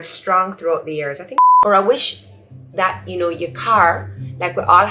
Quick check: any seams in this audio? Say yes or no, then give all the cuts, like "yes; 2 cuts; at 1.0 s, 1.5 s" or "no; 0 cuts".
yes; 1 cut; at 1.3 s